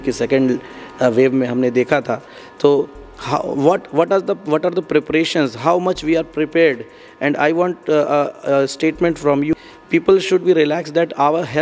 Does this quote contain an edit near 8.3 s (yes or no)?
no